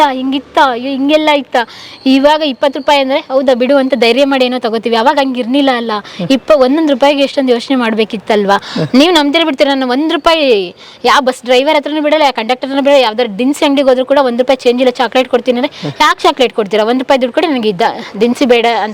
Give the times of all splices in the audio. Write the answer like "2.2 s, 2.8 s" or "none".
none